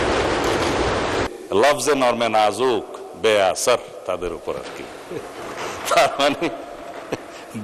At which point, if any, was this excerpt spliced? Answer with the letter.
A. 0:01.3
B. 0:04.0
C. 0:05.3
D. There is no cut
A